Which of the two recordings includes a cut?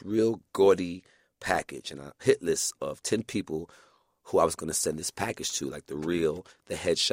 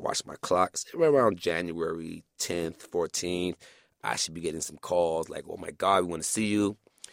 first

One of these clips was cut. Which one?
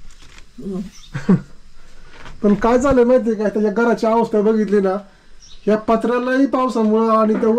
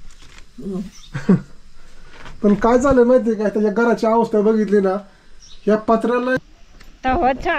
second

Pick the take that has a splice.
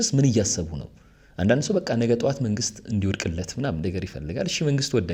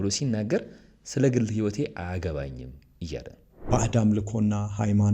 second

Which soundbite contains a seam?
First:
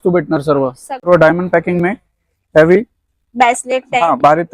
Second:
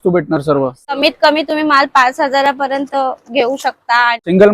first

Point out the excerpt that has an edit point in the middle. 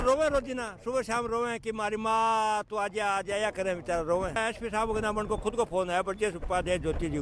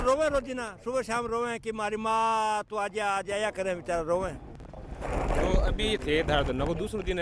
first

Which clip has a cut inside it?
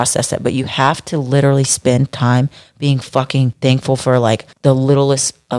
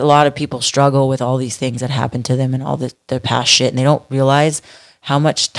first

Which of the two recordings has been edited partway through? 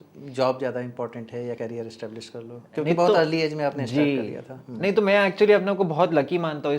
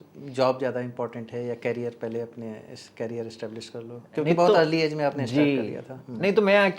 first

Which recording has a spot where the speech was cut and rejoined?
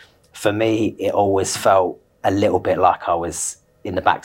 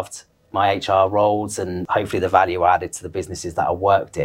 second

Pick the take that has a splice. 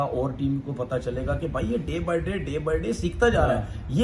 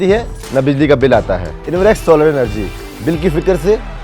second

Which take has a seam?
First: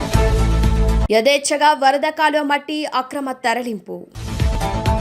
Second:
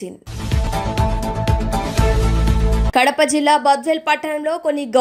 first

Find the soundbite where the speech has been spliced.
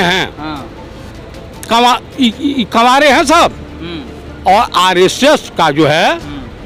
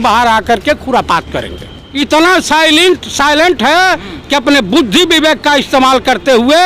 second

